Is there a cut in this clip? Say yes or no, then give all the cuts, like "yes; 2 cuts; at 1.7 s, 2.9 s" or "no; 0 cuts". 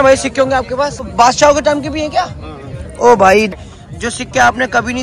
yes; 2 cuts; at 1.1 s, 3.5 s